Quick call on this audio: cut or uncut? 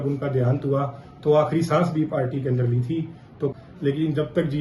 cut